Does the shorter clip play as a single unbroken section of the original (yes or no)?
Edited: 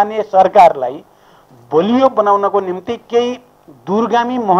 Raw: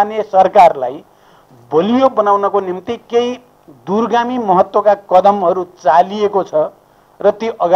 yes